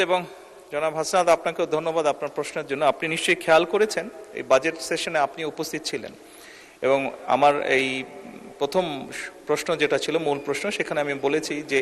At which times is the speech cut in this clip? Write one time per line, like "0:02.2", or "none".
none